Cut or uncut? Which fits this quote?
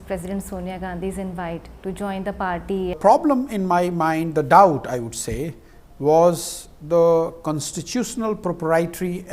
cut